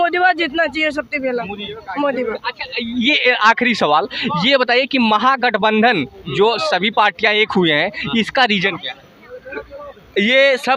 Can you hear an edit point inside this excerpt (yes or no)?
no